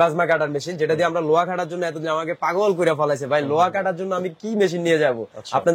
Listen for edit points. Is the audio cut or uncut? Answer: uncut